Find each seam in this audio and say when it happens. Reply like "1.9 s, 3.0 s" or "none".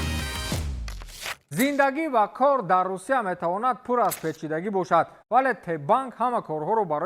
1.3 s